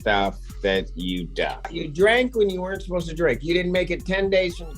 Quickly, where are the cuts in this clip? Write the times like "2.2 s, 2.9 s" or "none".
1.8 s